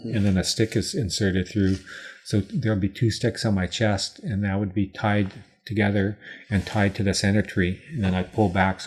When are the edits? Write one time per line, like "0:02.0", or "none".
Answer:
none